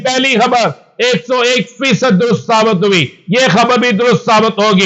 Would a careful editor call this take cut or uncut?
uncut